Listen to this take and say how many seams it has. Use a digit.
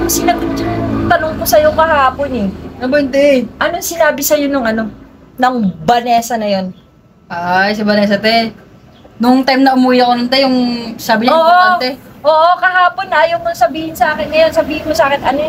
0